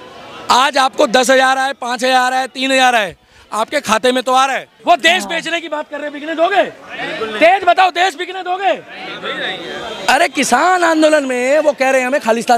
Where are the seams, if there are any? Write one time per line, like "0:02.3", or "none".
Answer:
0:04.7

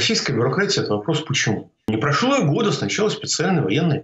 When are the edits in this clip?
0:01.9

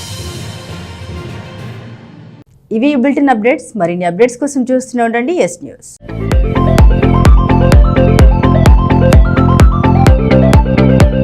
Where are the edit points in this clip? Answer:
none

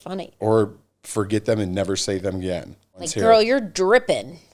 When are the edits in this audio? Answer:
0:03.0

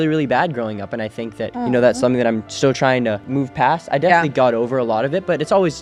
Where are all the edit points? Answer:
none

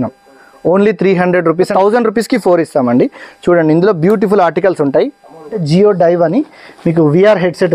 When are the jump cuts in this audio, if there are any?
0:01.7
0:05.6

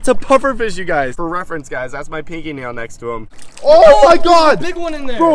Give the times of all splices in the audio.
0:01.1
0:03.4

